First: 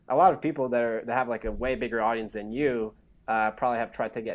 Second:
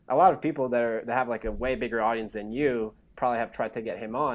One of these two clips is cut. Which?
second; 1 cut; at 3.1 s

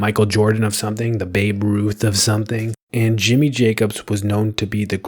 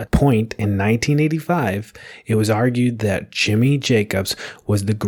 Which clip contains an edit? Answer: first; 1 cut; at 2.8 s

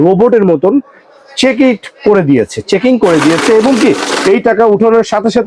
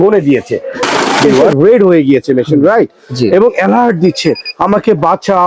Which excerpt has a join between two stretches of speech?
second; 1 cut; at 1.1 s

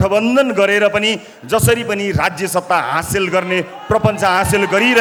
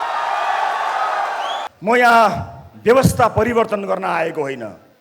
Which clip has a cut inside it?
second; 1 cut; at 1.7 s

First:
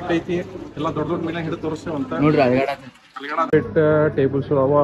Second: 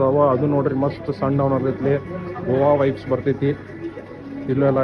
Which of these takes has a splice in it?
first; 1 cut; at 3.5 s

